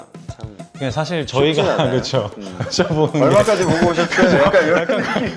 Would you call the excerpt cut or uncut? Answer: uncut